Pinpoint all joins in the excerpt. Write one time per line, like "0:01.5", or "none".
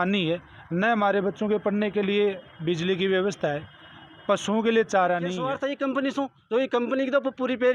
0:05.5